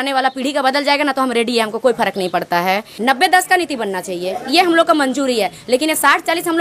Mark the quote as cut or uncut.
cut